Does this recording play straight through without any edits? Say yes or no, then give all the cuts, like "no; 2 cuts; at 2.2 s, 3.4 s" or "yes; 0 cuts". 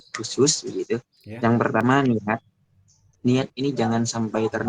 no; 1 cut; at 1.8 s